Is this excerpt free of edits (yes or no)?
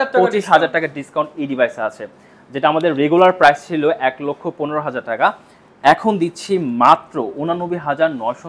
yes